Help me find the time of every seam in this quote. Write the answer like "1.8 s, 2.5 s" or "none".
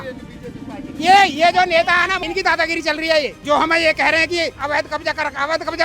2.2 s, 3.4 s, 4.6 s

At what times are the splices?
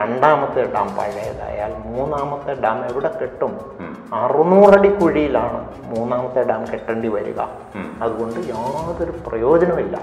none

